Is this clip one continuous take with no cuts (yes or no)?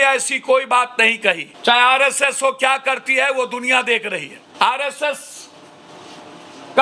no